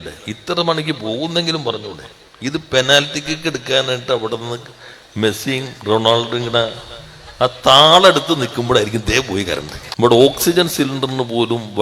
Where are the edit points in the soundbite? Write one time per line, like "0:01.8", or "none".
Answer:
0:09.8